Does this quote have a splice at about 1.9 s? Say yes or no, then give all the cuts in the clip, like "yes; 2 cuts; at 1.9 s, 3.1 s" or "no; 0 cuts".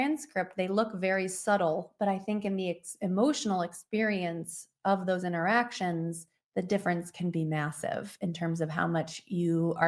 no; 0 cuts